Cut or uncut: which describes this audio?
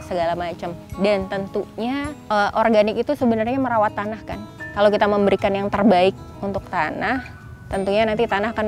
cut